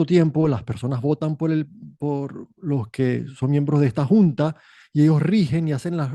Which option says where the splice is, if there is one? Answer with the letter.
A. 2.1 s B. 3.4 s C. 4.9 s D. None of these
A